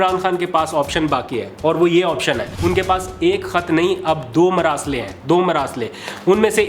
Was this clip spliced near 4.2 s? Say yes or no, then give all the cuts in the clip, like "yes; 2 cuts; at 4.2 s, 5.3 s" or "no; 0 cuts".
no; 1 cut; at 2.5 s